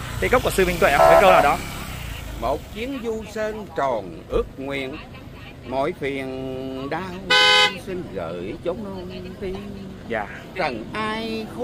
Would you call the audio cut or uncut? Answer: uncut